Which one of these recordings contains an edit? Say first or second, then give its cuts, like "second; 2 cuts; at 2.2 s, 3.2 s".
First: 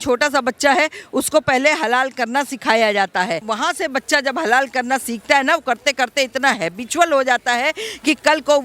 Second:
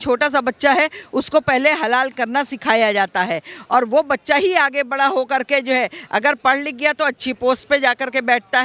first; 1 cut; at 3.5 s